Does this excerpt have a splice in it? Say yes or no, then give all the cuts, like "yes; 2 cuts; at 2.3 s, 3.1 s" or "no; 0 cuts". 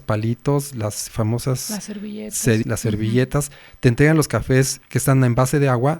yes; 2 cuts; at 2.7 s, 4.8 s